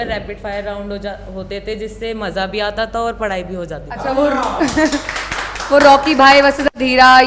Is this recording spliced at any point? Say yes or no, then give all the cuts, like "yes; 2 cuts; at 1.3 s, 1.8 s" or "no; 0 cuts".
no; 0 cuts